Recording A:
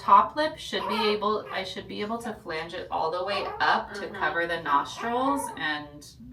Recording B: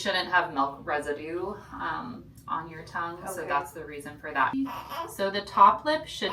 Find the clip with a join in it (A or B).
B